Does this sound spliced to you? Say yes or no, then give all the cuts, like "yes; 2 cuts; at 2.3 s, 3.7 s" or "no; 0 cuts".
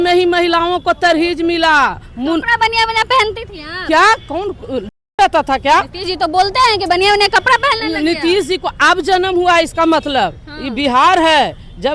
no; 0 cuts